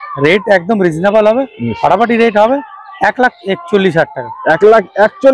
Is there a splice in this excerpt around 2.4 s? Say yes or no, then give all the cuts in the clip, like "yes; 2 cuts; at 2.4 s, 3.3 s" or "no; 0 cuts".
no; 0 cuts